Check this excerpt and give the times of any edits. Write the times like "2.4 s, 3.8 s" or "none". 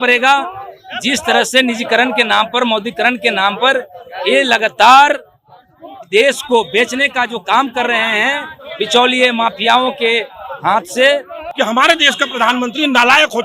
11.4 s